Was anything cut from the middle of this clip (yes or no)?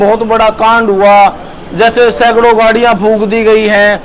no